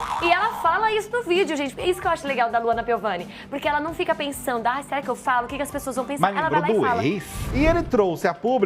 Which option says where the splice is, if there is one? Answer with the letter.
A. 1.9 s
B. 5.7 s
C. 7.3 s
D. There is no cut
C